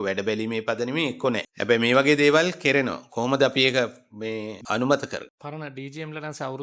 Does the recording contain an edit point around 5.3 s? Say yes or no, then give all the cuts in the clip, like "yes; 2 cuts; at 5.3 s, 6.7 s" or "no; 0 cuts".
yes; 1 cut; at 5.3 s